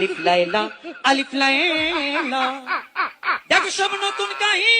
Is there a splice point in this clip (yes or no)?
no